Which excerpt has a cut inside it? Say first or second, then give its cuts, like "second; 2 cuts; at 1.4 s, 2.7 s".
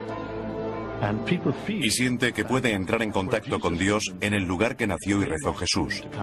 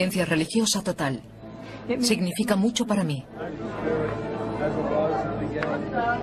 first; 1 cut; at 1.2 s